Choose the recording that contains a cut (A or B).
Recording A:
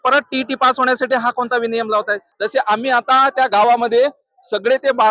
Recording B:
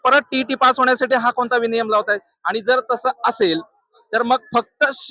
A